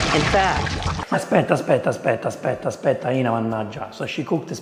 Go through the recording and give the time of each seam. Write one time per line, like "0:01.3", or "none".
0:01.0